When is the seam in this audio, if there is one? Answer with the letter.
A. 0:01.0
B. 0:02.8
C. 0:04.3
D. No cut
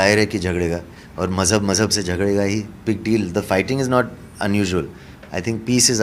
B